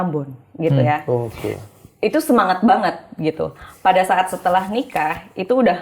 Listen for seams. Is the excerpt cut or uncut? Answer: uncut